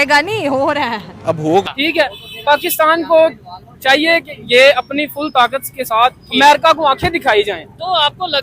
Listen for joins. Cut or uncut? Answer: cut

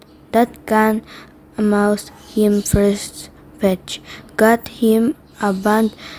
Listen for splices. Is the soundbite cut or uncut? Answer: cut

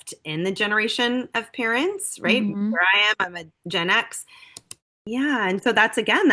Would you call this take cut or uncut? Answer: cut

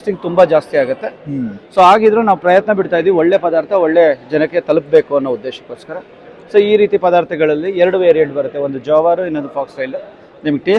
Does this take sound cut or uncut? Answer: uncut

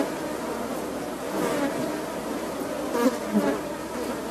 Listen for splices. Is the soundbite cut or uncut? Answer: uncut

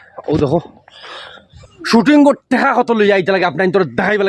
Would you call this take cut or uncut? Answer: cut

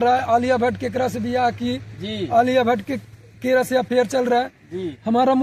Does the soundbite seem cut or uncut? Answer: uncut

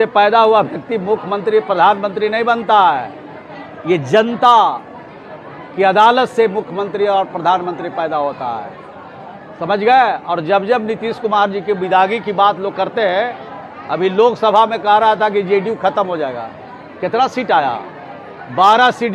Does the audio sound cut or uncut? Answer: uncut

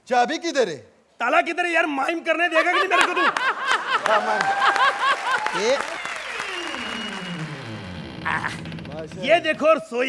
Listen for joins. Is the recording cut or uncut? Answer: uncut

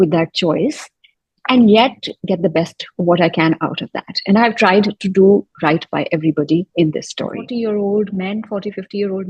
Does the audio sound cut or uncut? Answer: cut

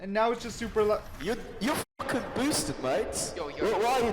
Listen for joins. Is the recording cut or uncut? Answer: cut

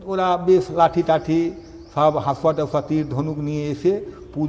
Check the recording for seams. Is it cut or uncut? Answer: uncut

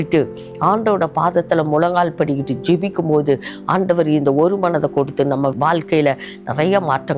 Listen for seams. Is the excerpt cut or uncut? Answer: cut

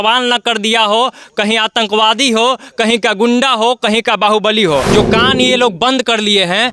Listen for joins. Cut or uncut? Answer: cut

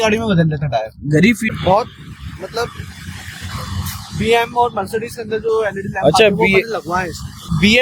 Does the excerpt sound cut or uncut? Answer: cut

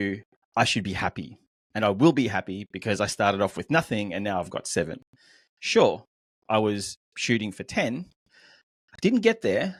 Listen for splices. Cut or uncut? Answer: uncut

